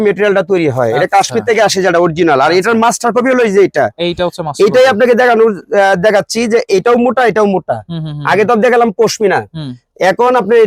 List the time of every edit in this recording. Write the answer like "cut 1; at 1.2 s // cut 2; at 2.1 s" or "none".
none